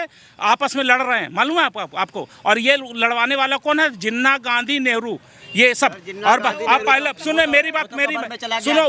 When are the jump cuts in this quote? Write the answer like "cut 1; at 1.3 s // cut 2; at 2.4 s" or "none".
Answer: none